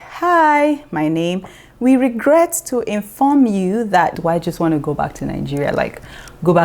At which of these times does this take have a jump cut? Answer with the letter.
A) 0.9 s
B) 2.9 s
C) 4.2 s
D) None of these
C